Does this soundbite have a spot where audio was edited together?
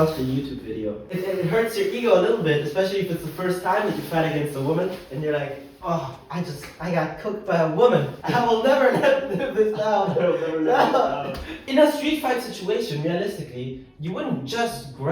yes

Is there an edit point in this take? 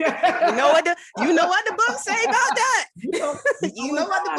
no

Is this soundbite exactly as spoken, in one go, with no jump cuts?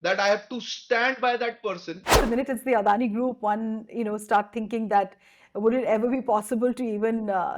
no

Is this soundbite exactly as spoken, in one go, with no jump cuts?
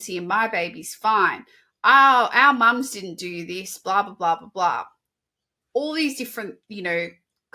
yes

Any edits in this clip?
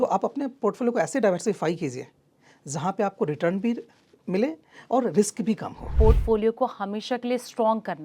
yes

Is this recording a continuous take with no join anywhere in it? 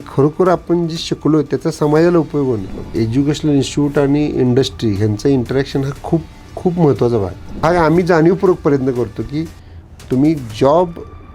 no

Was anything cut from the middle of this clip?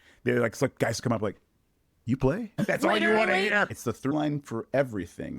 yes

